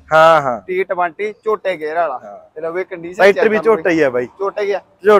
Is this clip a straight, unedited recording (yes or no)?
yes